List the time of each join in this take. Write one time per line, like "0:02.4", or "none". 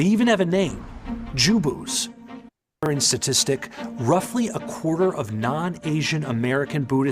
0:02.9